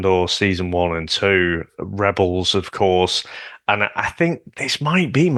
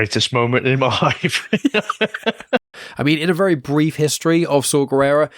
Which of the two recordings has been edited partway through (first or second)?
second